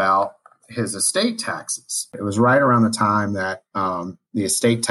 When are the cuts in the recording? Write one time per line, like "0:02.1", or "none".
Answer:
0:02.2

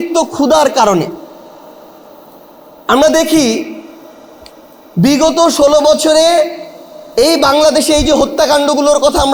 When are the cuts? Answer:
none

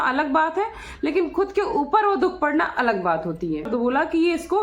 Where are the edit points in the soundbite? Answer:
0:03.7

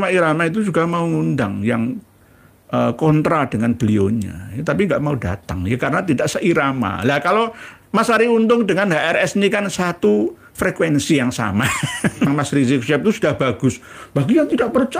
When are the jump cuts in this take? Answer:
0:12.3

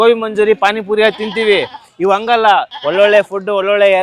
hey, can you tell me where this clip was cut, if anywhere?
0:02.8

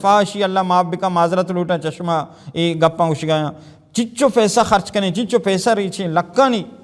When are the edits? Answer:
none

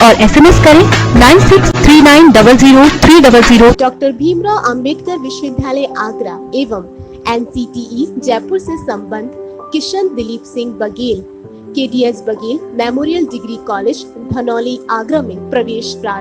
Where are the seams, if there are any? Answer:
0:03.7

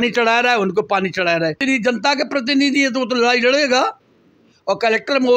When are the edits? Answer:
0:01.6

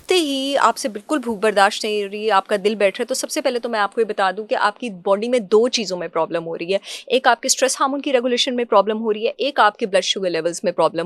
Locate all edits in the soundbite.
none

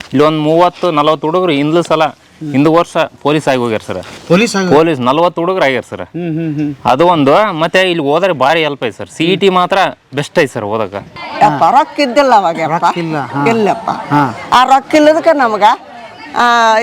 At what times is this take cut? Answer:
0:11.2

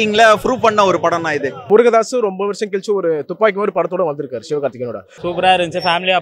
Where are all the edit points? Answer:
0:01.7
0:05.1

